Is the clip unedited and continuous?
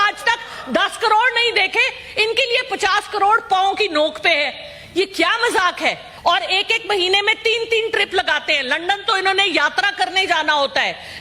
no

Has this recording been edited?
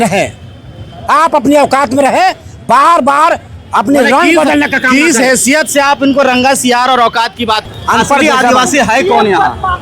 yes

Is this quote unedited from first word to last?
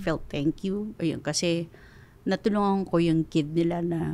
yes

